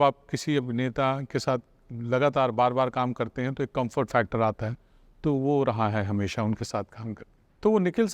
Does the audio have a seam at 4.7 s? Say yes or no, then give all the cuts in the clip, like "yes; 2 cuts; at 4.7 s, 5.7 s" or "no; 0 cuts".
no; 0 cuts